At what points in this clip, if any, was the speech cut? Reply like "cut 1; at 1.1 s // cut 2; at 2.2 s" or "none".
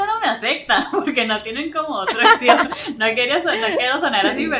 none